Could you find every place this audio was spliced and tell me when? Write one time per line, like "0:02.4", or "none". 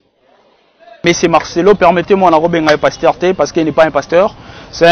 0:01.0